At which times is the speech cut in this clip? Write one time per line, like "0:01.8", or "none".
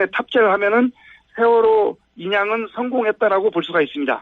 0:02.1